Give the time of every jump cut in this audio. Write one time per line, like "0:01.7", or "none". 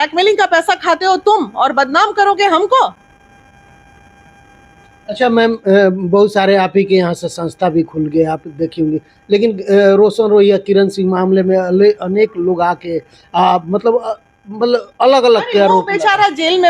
none